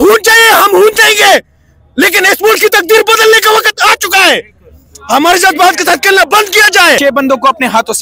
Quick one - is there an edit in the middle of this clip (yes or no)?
yes